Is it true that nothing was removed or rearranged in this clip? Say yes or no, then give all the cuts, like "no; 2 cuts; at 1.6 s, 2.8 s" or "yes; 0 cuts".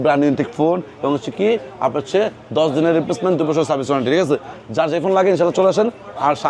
yes; 0 cuts